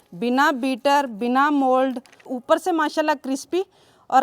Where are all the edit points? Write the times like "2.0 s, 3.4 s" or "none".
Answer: 2.3 s